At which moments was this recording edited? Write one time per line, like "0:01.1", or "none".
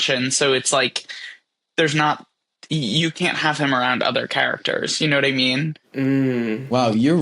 none